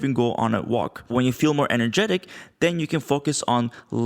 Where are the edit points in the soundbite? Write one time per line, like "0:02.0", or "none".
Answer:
0:01.1